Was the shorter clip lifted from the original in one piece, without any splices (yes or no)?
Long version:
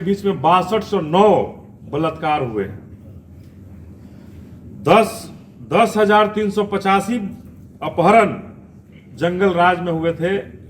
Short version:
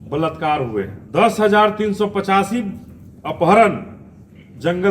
no